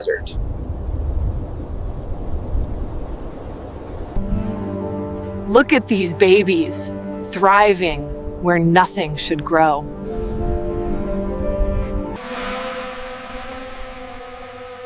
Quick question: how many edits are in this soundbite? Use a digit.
0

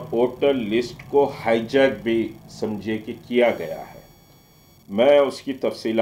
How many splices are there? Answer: 0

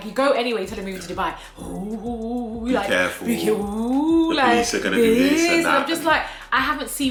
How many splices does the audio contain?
0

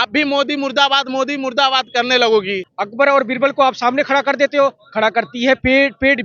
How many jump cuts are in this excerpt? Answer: 1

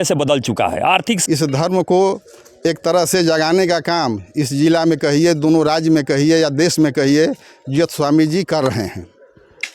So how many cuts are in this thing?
1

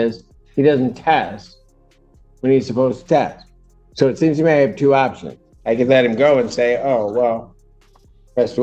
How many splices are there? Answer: 0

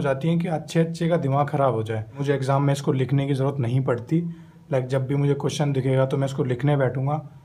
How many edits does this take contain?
1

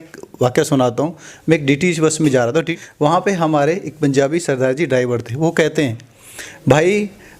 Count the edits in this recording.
1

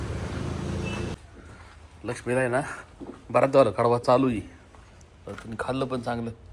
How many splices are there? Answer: 1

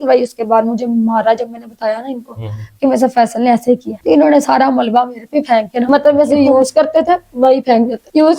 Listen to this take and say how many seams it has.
1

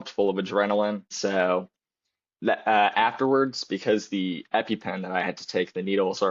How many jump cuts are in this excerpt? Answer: 1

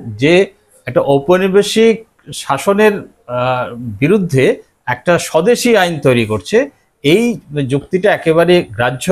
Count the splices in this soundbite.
0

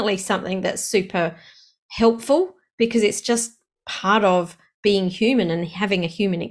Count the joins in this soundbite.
0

